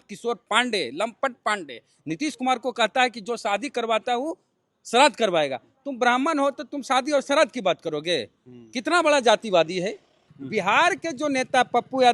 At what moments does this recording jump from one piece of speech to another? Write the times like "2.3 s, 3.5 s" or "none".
10.3 s